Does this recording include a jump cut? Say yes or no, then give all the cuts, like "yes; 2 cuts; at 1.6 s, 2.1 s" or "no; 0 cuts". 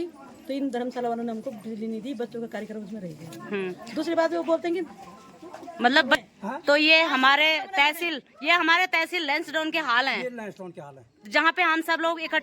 yes; 1 cut; at 6.2 s